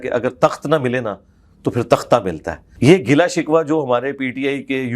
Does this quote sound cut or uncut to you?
cut